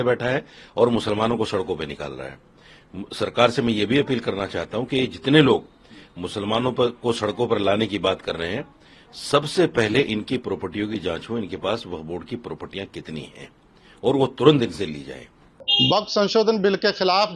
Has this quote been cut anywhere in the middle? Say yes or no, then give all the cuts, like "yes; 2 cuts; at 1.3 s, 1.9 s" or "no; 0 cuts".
no; 0 cuts